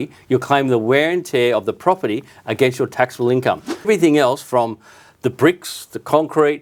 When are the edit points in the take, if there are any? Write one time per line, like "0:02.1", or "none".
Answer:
0:03.9